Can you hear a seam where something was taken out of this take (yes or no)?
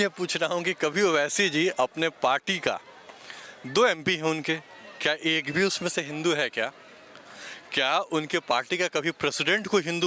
no